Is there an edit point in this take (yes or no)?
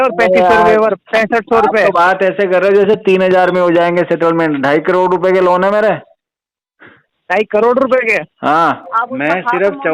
yes